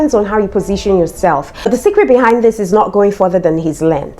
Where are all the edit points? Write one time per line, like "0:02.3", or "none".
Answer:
0:01.6